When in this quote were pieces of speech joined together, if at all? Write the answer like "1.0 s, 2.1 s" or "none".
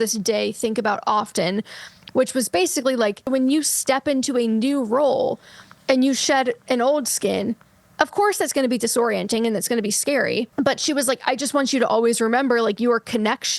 3.3 s, 10.5 s

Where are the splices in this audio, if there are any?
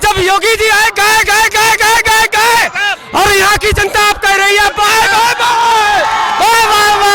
none

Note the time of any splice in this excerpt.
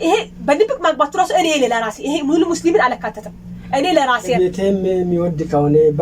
4.4 s

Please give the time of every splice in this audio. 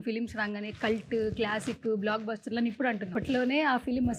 3.1 s

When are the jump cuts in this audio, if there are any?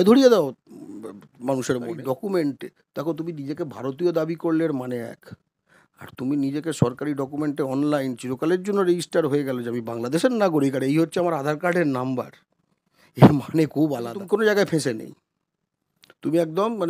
1.9 s, 14.2 s

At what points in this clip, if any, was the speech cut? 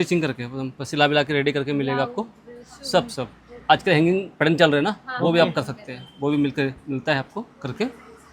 none

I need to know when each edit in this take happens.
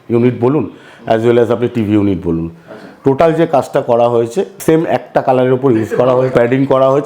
4.5 s, 6.3 s

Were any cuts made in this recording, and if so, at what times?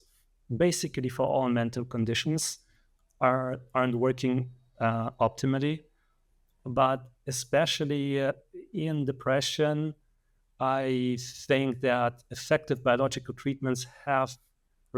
none

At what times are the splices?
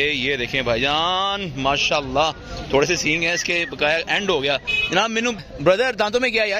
5.4 s

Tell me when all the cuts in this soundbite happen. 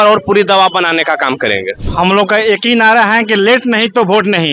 1.8 s

